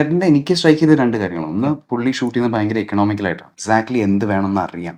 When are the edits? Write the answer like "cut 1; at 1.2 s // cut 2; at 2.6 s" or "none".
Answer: none